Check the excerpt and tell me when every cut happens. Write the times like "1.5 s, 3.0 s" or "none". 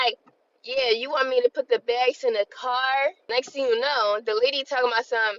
3.2 s